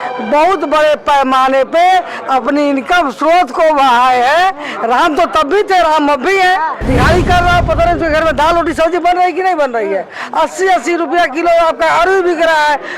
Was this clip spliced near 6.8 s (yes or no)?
yes